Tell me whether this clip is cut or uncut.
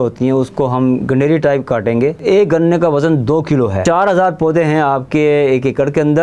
cut